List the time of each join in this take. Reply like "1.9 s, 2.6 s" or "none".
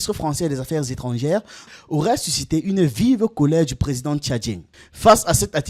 1.6 s, 4.6 s